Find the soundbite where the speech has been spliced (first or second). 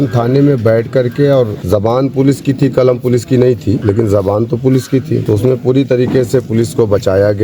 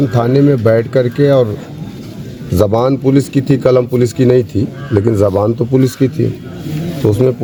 first